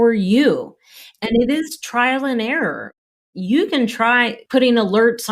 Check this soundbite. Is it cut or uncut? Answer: cut